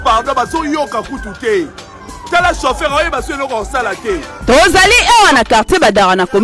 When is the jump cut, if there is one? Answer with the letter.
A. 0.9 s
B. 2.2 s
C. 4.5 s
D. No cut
C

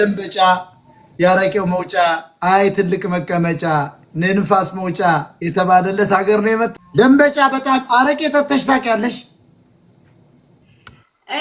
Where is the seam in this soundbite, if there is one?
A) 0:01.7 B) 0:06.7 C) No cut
B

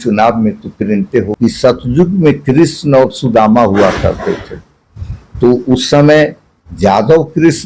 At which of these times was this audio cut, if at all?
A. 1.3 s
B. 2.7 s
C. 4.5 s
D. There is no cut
A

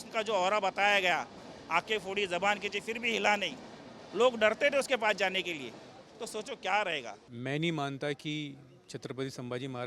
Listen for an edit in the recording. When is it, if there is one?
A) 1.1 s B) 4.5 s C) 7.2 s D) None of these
C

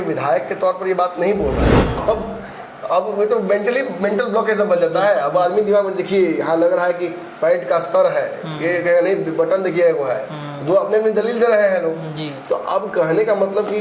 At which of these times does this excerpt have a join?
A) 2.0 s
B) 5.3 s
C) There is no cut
A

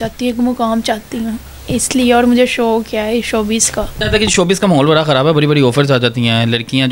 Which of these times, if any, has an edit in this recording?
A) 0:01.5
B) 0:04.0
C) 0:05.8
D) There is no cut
B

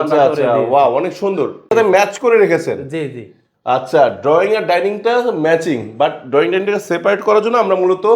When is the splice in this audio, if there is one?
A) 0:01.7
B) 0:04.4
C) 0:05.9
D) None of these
A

